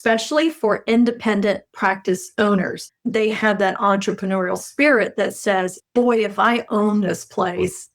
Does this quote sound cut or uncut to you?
cut